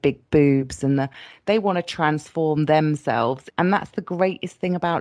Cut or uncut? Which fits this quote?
cut